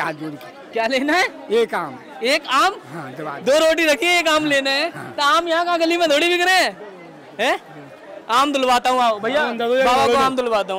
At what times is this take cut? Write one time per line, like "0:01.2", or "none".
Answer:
none